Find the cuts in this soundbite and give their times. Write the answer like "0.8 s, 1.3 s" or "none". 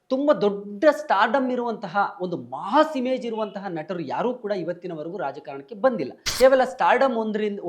6.2 s